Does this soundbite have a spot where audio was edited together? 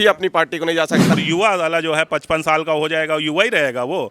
yes; 1 cut; at 1.1 s

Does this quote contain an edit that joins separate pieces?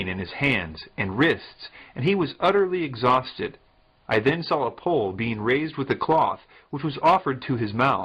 yes; 1 cut; at 5.1 s

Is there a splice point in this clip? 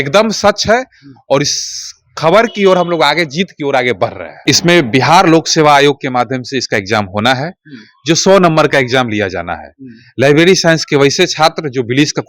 yes; 1 cut; at 4.3 s

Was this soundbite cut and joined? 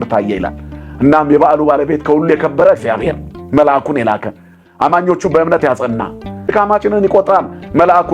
yes; 1 cut; at 6.5 s

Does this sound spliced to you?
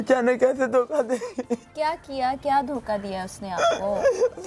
no; 0 cuts

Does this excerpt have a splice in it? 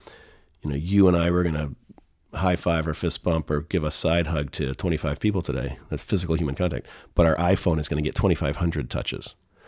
no; 0 cuts

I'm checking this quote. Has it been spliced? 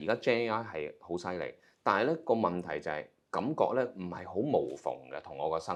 no; 0 cuts

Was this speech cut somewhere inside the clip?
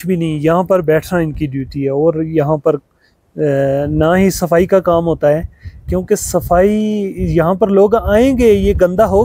no; 0 cuts

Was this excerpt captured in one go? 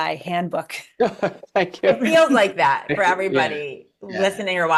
yes; 0 cuts

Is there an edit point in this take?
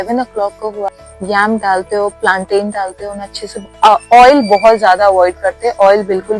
yes; 1 cut; at 1.0 s

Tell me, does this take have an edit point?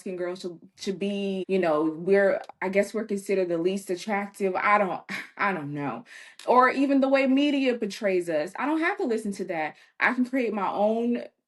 yes; 1 cut; at 1.4 s

